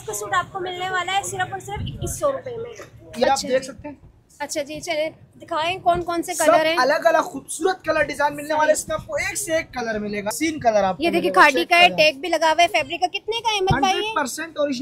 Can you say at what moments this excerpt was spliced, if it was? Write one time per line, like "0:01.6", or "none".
0:03.2
0:10.3